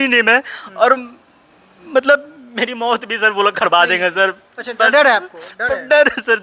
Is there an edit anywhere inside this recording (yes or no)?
no